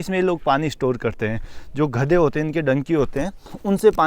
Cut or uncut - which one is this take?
uncut